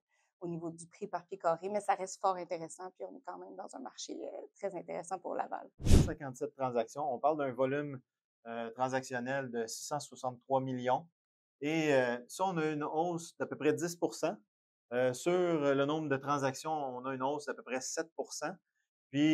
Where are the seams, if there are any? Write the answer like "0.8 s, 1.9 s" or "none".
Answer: 6.0 s